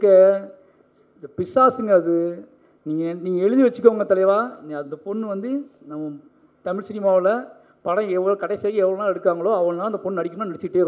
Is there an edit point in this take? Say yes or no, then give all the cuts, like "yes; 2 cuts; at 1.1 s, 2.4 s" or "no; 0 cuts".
no; 0 cuts